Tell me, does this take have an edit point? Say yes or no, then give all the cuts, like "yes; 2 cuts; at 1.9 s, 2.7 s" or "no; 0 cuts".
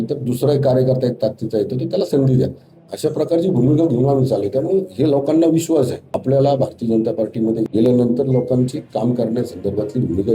yes; 2 cuts; at 6.1 s, 7.6 s